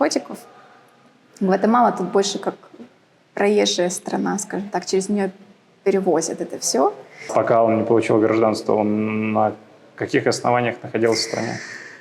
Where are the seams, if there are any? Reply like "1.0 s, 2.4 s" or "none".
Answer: 7.3 s